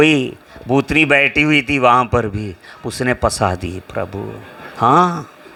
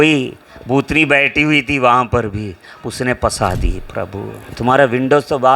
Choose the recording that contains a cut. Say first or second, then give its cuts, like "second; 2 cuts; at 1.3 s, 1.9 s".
second; 1 cut; at 4.5 s